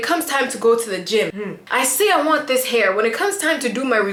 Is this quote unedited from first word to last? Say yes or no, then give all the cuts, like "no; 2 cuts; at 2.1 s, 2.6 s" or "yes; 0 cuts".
yes; 0 cuts